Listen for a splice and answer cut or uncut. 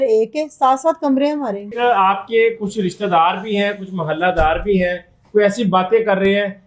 cut